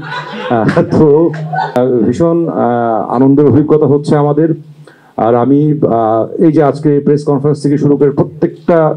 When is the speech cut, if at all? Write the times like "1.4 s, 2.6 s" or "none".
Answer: 1.7 s